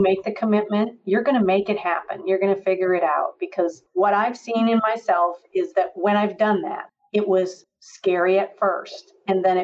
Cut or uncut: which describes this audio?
cut